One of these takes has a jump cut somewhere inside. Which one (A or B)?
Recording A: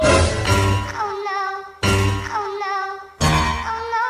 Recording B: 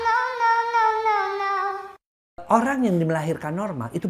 B